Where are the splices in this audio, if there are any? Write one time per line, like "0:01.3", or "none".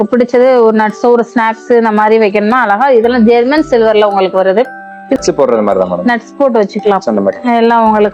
0:05.2